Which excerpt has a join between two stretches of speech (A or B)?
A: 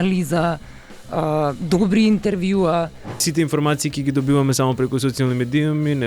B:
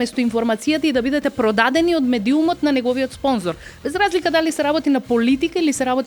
A